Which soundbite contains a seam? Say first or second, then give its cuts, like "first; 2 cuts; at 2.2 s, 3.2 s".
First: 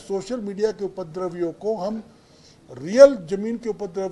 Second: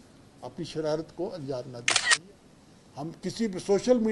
second; 1 cut; at 2.0 s